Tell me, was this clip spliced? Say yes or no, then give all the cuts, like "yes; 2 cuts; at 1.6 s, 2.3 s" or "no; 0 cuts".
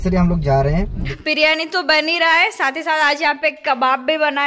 yes; 1 cut; at 1.2 s